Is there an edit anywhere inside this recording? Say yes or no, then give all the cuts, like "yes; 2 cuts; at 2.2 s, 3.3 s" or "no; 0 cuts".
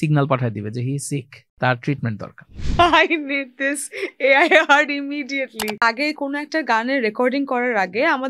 yes; 3 cuts; at 1.4 s, 2.6 s, 5.8 s